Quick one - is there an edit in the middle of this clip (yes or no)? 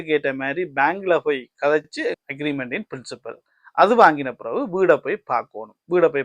no